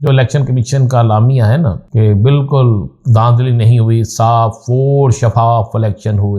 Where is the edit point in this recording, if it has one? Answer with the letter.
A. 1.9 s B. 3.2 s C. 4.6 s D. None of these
A